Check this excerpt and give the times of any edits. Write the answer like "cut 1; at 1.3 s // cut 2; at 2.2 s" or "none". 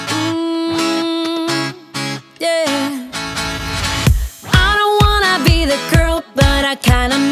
cut 1; at 2.3 s

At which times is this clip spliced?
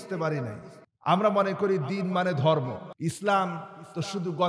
cut 1; at 2.9 s

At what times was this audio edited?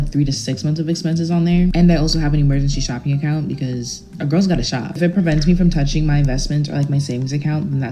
none

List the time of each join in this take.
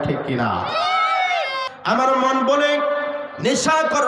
cut 1; at 1.6 s

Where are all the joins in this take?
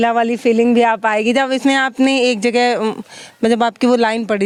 none

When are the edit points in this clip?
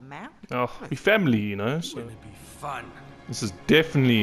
cut 1; at 1.9 s

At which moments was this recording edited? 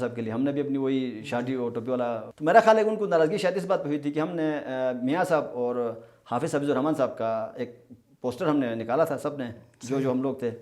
cut 1; at 2.3 s

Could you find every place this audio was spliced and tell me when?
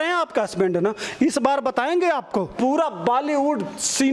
cut 1; at 2.5 s

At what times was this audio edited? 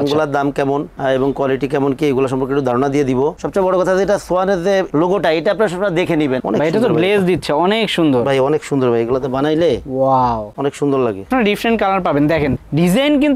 cut 1; at 3.4 s // cut 2; at 6.4 s // cut 3; at 11.3 s

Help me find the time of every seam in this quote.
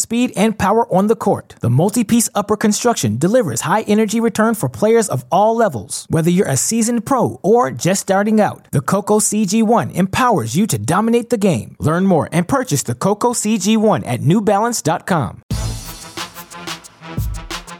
cut 1; at 15.5 s

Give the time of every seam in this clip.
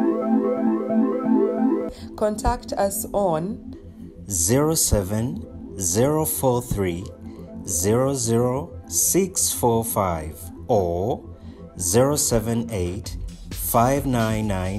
cut 1; at 1.8 s

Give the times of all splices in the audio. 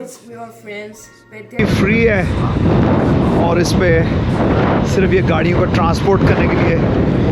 cut 1; at 1.6 s

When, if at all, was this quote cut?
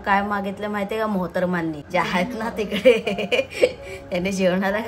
none

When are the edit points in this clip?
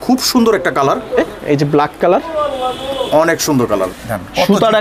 cut 1; at 1.3 s // cut 2; at 3.9 s

